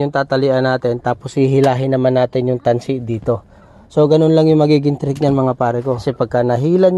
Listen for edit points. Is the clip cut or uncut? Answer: cut